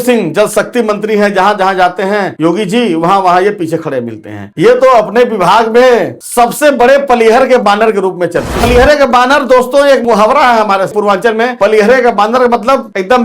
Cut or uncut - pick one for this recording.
cut